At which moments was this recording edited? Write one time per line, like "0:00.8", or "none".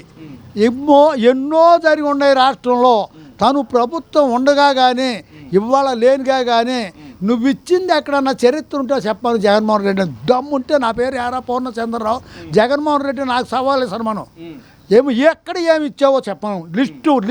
none